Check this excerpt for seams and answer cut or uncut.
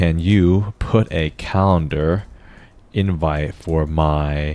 uncut